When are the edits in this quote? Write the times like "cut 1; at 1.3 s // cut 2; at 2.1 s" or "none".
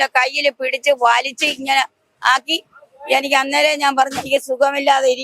none